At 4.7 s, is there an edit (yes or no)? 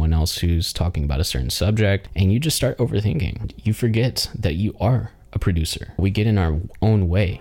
no